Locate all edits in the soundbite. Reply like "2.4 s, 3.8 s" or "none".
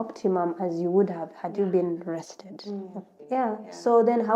3.1 s